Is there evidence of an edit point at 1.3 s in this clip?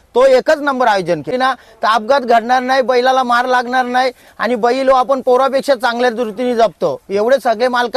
yes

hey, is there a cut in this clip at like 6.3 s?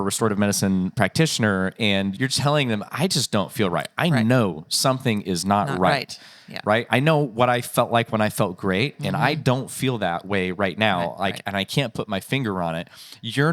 no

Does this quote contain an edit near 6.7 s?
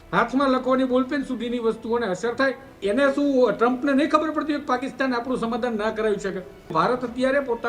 yes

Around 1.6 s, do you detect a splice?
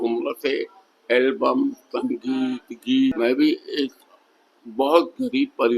no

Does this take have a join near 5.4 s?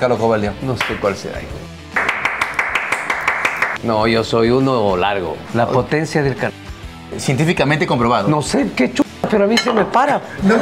yes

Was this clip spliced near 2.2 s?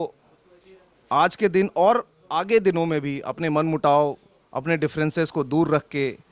no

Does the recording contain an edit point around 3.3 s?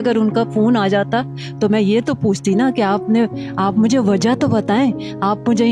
no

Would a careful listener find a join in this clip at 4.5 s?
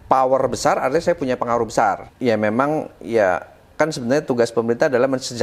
no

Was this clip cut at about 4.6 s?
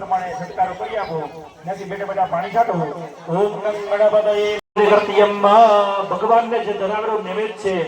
yes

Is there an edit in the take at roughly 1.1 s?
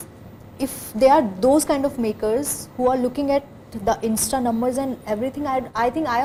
no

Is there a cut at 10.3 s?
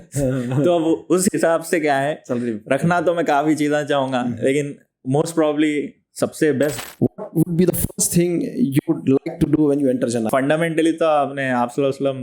yes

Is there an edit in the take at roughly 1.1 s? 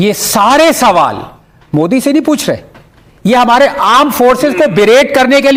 no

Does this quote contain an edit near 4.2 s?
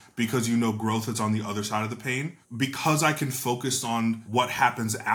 yes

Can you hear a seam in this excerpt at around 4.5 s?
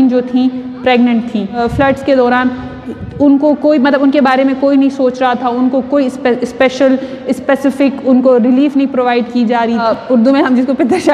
no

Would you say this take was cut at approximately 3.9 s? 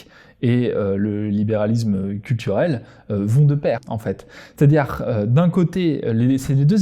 yes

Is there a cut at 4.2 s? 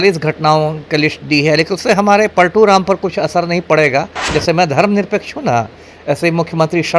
yes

